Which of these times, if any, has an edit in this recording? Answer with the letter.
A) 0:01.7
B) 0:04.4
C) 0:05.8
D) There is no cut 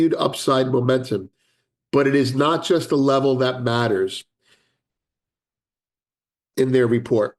D